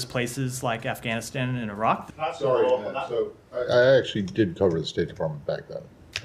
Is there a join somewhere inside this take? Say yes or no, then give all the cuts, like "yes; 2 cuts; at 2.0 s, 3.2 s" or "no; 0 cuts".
yes; 1 cut; at 2.1 s